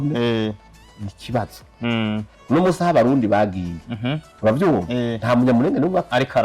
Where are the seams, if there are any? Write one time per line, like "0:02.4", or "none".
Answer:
0:02.3